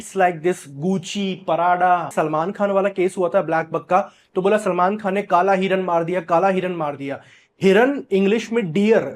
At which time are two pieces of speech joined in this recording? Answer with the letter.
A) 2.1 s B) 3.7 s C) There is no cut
A